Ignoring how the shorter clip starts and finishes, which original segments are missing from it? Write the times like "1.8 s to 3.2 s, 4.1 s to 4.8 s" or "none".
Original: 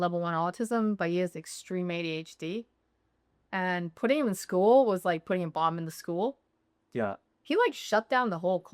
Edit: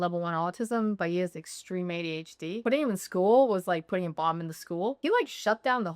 2.6 s to 4.0 s, 6.3 s to 7.4 s